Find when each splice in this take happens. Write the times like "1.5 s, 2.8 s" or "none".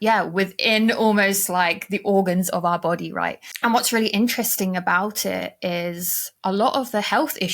3.4 s